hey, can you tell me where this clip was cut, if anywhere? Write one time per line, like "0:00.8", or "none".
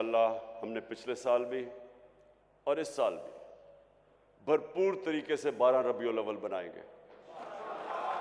none